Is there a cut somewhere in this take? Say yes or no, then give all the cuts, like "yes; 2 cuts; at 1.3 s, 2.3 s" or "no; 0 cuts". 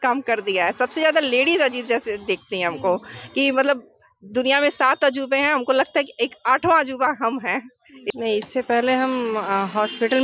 yes; 1 cut; at 7.9 s